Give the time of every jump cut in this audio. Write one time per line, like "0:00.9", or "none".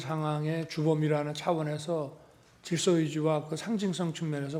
none